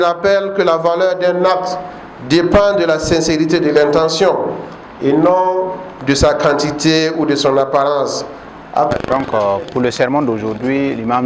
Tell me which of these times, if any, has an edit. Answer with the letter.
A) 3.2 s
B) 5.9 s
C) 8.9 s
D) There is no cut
C